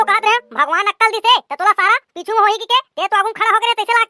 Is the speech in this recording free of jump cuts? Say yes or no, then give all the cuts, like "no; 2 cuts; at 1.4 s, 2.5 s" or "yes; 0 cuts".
yes; 0 cuts